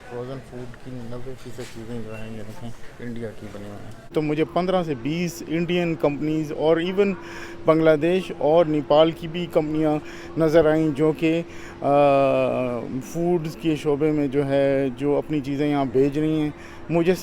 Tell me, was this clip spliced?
yes; 1 cut; at 4.1 s

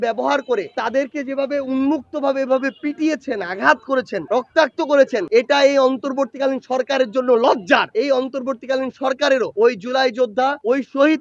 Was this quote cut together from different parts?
yes; 2 cuts; at 5.3 s, 7.9 s

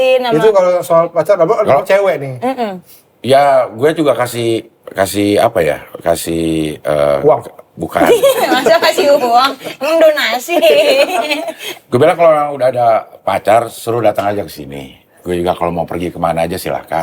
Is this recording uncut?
yes; 0 cuts

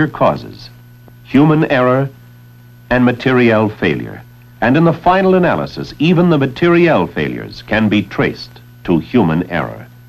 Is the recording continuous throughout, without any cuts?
yes; 0 cuts

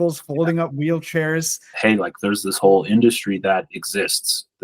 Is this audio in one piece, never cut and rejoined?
no; 1 cut; at 1.7 s

